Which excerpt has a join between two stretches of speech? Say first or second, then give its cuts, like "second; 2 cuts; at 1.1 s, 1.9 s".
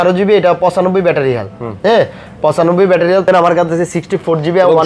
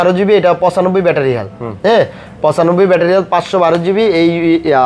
first; 1 cut; at 3.3 s